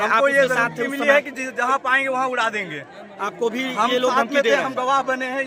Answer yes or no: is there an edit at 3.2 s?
no